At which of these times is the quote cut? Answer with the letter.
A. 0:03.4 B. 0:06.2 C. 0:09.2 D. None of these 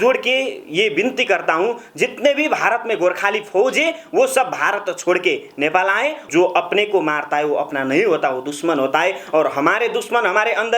B